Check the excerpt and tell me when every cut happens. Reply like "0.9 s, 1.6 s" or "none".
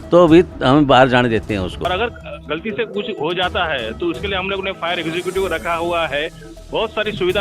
1.9 s